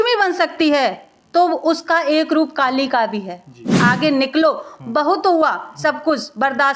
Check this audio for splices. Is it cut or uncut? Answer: cut